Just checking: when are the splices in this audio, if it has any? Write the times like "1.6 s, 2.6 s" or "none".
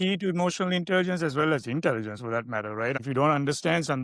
3.0 s